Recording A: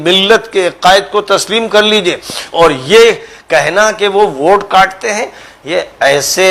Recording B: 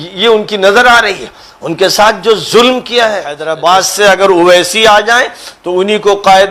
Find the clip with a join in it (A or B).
B